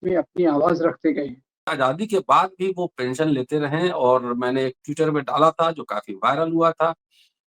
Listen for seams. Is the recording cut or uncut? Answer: cut